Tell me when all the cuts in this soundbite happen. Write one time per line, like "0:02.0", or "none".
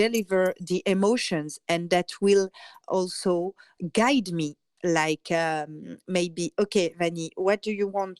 0:02.8
0:03.8
0:04.6

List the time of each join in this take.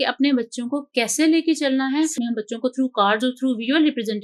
0:02.1

